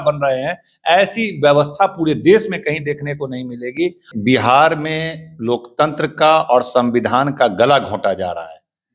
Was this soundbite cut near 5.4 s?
no; 1 cut; at 4.1 s

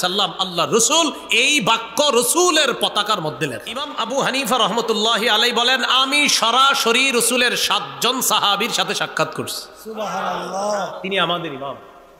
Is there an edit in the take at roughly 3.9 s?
yes; 1 cut; at 3.9 s

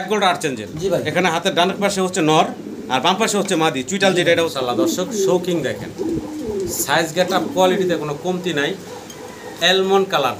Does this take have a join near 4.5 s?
yes; 1 cut; at 4.5 s

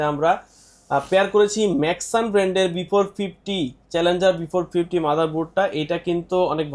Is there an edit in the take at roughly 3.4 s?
no; 0 cuts

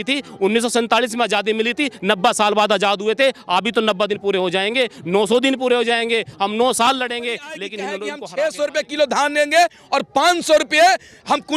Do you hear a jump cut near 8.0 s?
yes; 1 cut; at 8.0 s

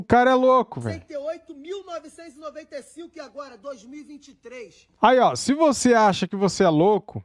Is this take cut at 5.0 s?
no; 0 cuts

